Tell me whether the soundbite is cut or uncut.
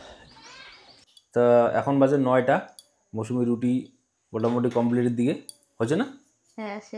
cut